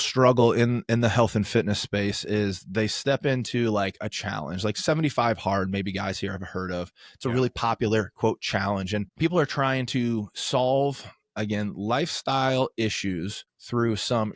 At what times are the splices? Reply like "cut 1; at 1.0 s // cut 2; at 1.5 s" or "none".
none